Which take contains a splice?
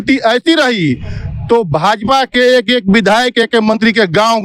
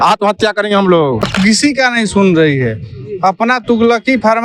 second; 1 cut; at 1.2 s

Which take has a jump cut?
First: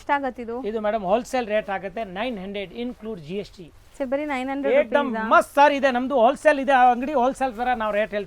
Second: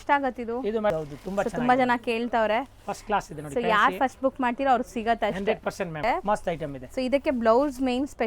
second; 2 cuts; at 0.9 s, 6.0 s

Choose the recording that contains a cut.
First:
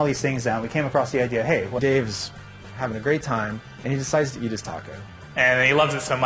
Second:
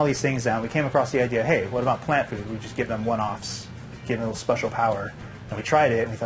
second; 1 cut; at 1.8 s

